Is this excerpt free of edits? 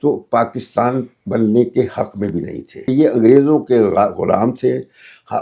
no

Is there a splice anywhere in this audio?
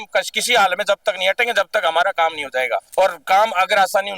yes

